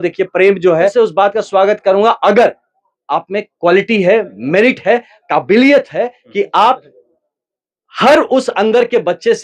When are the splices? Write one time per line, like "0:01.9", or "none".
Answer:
0:00.9